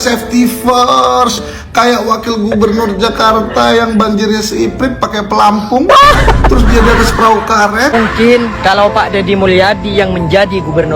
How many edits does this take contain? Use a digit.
1